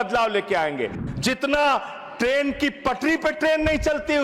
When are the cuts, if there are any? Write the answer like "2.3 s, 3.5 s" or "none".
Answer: 1.0 s